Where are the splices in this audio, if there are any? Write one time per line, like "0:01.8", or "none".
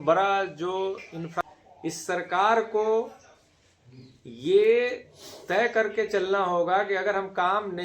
0:01.4